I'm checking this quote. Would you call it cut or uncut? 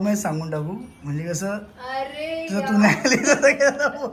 uncut